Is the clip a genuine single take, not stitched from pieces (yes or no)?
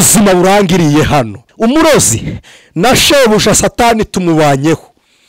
no